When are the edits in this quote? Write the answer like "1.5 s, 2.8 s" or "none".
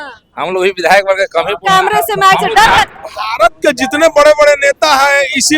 2.9 s